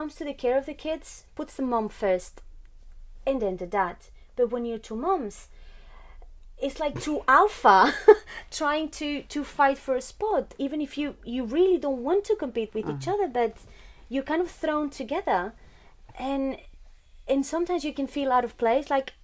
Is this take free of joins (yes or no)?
yes